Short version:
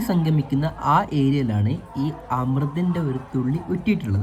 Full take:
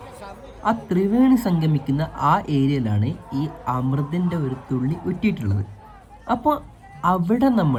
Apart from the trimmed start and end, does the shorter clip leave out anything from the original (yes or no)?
no